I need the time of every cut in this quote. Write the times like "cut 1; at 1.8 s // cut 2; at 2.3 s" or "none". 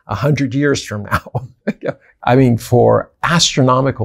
cut 1; at 2.0 s